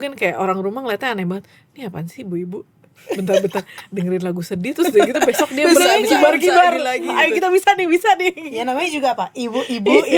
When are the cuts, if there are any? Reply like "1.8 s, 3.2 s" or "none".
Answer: none